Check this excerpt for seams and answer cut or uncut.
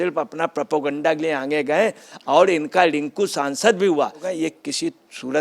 cut